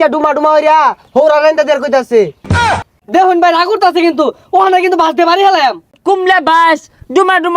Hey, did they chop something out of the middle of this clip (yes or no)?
yes